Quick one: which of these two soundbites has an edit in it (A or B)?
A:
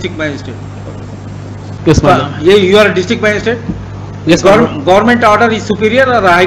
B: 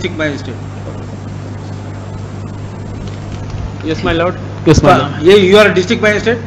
A